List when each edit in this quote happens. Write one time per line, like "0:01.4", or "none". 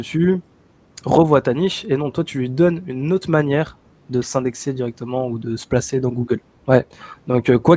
0:06.6